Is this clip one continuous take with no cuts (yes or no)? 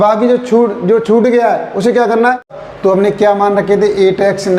no